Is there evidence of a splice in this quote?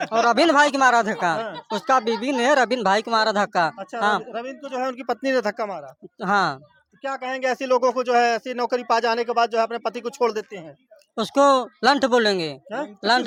no; 0 cuts

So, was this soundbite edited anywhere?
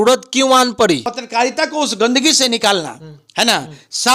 yes; 1 cut; at 1.2 s

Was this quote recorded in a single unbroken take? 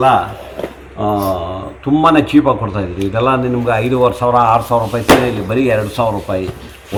yes; 0 cuts

